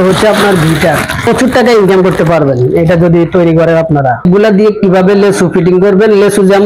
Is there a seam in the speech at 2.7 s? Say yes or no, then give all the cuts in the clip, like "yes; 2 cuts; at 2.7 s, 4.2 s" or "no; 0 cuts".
no; 2 cuts; at 1.3 s, 4.2 s